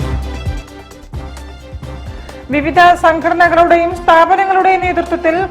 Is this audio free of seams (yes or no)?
yes